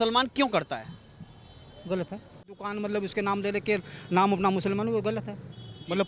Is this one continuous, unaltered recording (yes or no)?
no